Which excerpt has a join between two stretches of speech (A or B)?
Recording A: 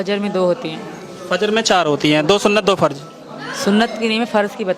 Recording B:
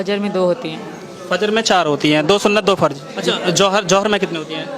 B